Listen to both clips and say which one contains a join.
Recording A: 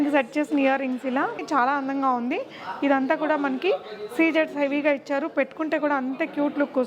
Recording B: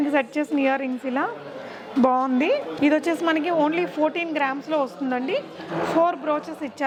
A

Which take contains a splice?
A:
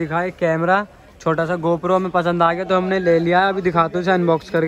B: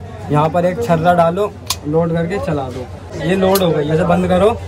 B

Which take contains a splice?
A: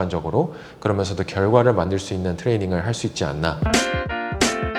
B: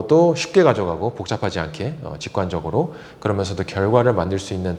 A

